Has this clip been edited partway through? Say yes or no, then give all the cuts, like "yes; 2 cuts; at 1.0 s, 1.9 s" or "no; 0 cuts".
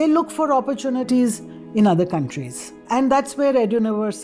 yes; 2 cuts; at 1.1 s, 2.8 s